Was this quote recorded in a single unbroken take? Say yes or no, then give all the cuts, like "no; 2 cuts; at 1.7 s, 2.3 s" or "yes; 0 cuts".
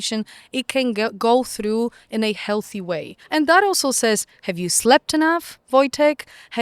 no; 1 cut; at 3.1 s